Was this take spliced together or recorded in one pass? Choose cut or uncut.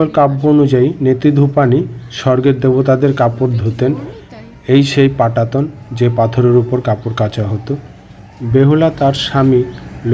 uncut